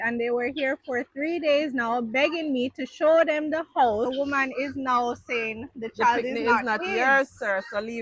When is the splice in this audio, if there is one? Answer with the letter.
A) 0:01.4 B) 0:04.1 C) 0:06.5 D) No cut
B